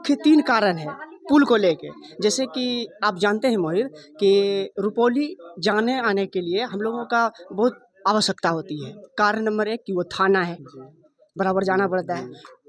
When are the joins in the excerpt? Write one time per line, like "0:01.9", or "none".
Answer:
none